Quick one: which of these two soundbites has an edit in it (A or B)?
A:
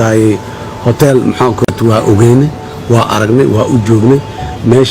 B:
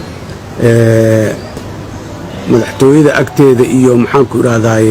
A